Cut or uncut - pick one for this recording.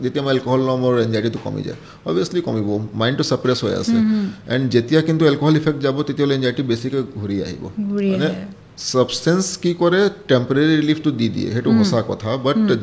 uncut